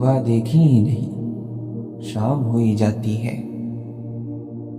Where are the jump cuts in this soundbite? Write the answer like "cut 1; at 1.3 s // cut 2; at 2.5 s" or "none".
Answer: cut 1; at 1.0 s // cut 2; at 2.1 s // cut 3; at 3.3 s